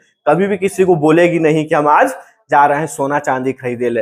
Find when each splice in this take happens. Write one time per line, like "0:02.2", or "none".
none